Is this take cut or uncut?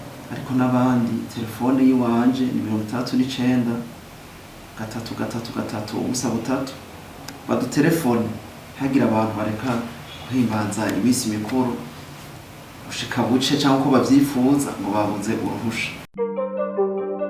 cut